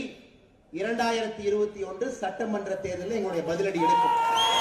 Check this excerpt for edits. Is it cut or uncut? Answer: uncut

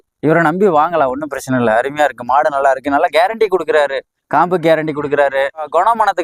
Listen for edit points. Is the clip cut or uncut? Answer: uncut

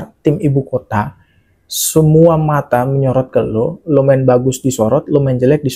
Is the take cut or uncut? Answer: uncut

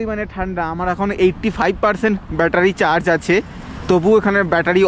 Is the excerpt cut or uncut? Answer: uncut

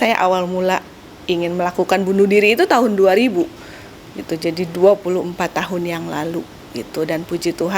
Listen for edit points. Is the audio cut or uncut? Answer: uncut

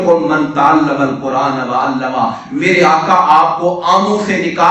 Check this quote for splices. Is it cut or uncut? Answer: uncut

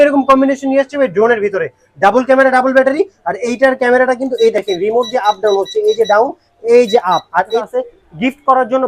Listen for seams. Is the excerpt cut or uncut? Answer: cut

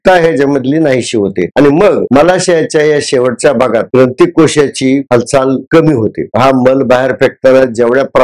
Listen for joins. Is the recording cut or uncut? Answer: cut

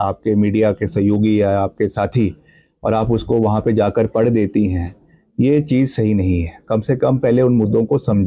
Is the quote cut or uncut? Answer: uncut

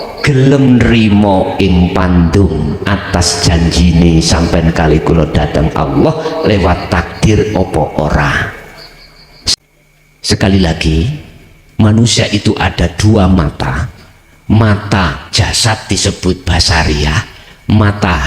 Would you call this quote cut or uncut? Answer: cut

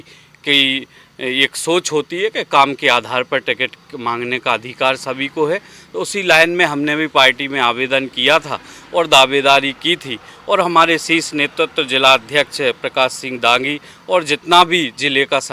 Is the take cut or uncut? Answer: uncut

